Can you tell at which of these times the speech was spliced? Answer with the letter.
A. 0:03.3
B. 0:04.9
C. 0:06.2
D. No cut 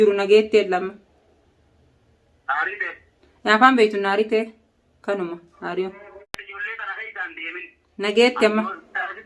C